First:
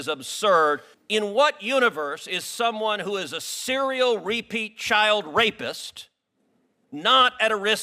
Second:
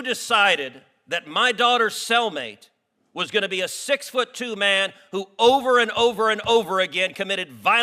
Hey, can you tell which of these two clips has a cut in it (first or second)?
first